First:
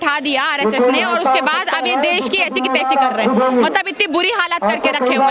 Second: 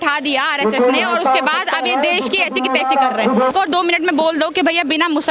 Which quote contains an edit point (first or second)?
second